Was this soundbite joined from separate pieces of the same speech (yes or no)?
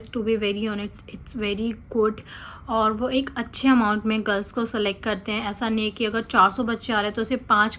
no